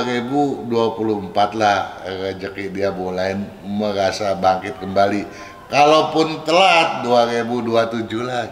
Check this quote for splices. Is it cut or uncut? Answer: uncut